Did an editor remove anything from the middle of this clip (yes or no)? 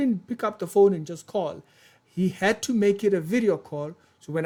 no